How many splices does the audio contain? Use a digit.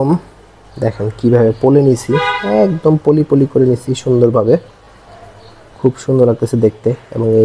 0